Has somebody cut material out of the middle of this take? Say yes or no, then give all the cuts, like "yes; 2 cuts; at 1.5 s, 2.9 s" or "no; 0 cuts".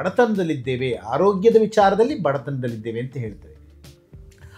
no; 0 cuts